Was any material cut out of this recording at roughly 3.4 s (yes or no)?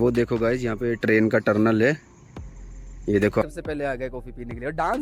yes